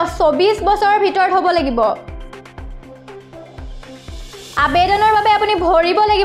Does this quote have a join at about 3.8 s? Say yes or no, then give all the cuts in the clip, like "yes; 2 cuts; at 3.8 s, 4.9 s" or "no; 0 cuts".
no; 0 cuts